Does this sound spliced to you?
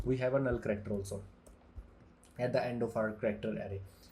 no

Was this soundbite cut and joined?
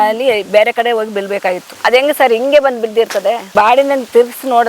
yes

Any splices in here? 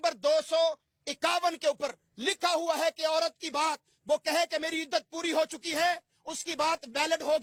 no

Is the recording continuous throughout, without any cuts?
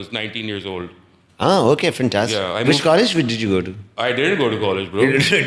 yes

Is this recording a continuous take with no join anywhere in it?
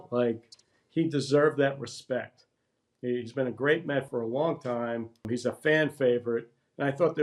no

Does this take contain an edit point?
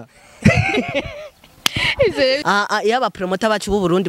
yes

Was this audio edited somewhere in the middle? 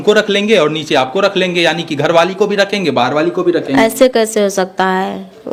no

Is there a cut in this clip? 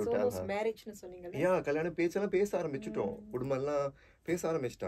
no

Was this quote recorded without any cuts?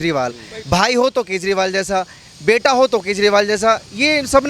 yes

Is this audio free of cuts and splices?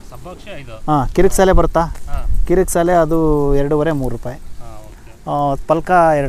yes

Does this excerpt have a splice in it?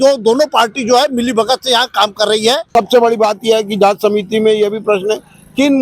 yes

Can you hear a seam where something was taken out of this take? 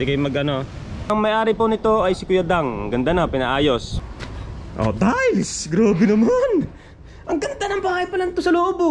yes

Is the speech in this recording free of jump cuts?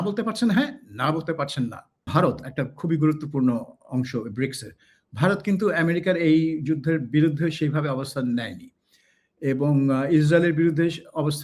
no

